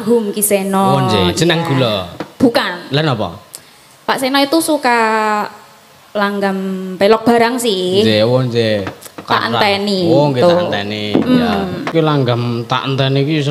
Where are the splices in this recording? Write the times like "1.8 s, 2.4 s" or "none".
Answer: 11.9 s